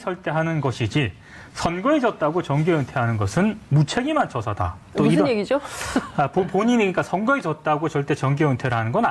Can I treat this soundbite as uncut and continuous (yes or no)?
yes